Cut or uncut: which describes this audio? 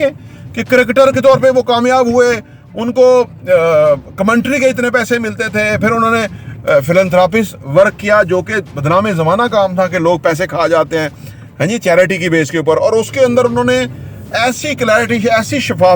uncut